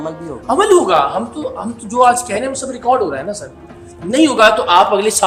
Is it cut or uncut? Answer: uncut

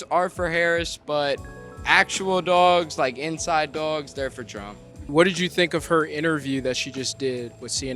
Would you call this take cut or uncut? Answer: cut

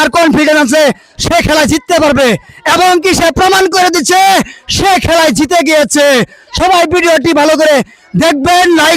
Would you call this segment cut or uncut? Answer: uncut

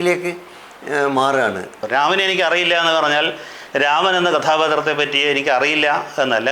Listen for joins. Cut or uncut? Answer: cut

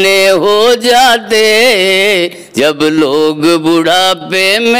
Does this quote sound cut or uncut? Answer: uncut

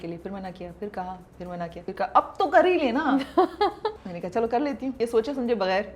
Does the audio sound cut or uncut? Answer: cut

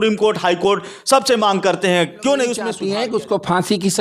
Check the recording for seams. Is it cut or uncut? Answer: cut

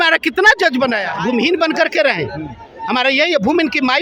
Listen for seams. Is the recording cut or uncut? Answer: cut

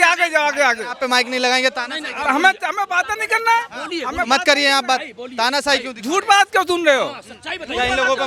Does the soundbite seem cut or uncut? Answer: uncut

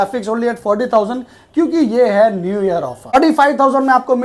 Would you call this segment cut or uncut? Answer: cut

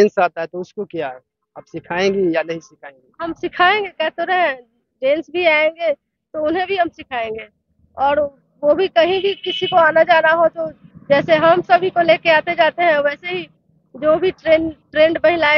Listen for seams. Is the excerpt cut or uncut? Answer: uncut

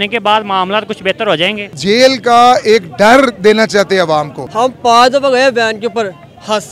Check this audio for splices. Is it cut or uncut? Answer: cut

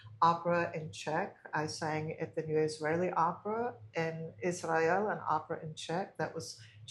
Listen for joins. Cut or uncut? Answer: uncut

